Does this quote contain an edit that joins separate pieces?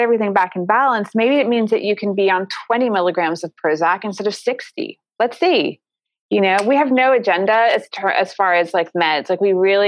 no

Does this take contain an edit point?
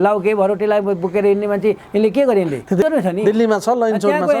yes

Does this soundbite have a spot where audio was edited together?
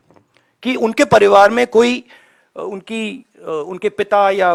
no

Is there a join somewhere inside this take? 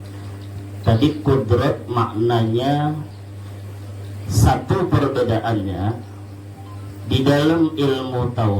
yes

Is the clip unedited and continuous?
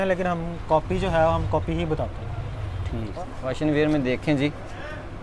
no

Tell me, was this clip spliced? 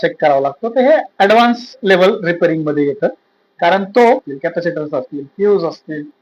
yes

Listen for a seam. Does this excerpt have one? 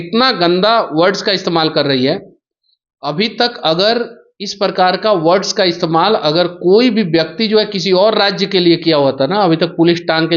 no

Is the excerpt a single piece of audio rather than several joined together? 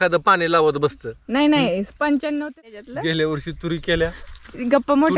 no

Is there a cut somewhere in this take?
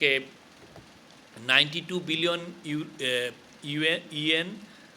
no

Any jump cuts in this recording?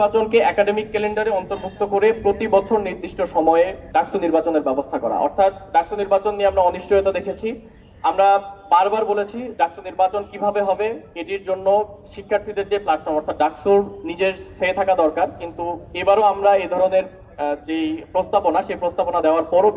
no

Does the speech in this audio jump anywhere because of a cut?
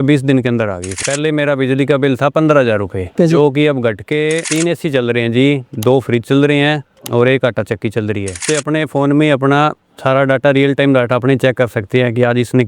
yes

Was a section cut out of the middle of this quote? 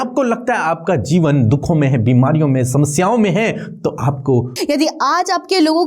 yes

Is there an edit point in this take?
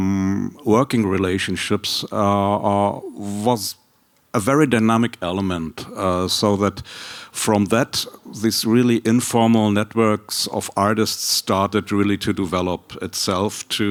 no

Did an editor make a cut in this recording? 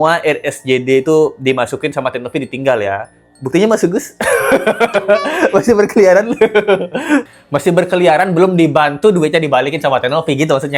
no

